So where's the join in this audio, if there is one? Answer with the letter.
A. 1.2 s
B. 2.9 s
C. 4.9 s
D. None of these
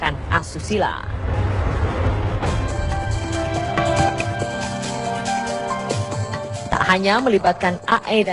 B